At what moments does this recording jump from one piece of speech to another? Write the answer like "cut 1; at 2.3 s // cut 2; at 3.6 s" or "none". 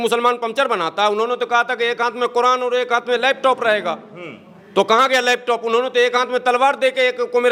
none